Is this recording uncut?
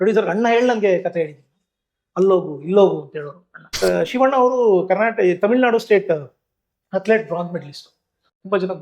no; 1 cut; at 3.8 s

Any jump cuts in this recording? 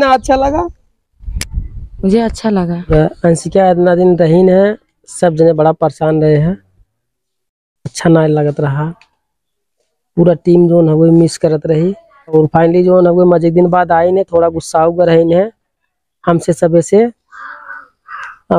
yes; 2 cuts; at 2.9 s, 12.3 s

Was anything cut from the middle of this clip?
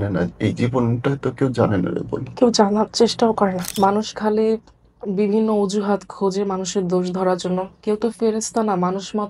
yes; 1 cut; at 3.7 s

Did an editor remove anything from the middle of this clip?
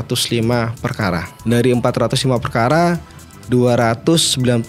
yes; 1 cut; at 1.3 s

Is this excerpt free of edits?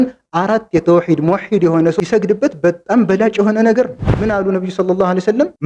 no; 1 cut; at 4.0 s

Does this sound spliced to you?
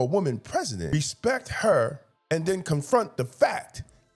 yes; 2 cuts; at 0.9 s, 2.1 s

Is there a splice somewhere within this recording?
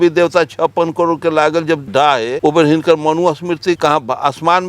yes; 2 cuts; at 1.8 s, 3.8 s

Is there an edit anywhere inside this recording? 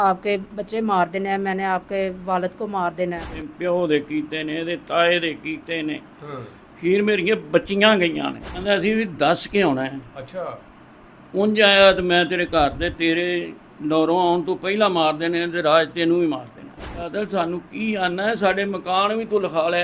yes; 3 cuts; at 3.5 s, 8.6 s, 17.1 s

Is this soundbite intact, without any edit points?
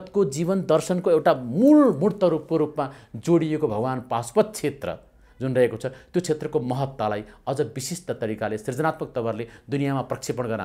yes; 0 cuts

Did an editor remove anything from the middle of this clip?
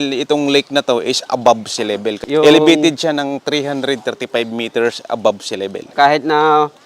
yes; 2 cuts; at 2.2 s, 5.9 s

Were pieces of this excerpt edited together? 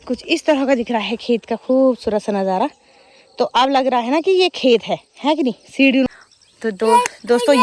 yes; 1 cut; at 6.1 s

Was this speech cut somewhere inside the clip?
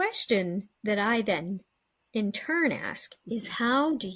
no; 0 cuts

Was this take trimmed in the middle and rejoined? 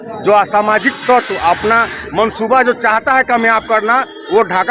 no; 0 cuts

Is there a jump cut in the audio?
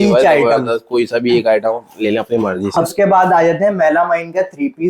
yes; 1 cut; at 2.9 s

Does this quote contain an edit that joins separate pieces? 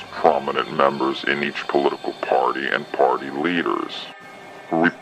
yes; 1 cut; at 2.0 s

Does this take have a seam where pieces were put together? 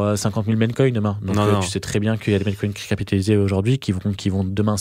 no; 0 cuts

